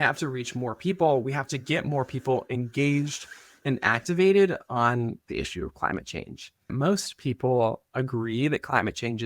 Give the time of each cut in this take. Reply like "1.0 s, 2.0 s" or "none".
6.7 s